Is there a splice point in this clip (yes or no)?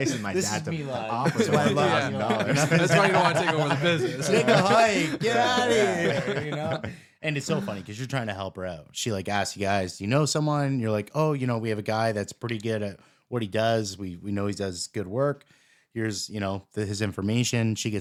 no